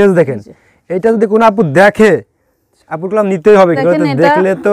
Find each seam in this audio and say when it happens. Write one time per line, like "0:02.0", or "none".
0:03.8